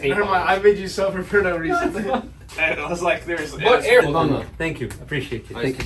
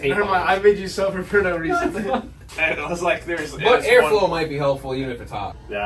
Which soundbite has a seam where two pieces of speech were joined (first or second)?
first